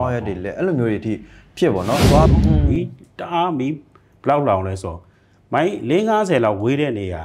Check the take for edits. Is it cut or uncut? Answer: cut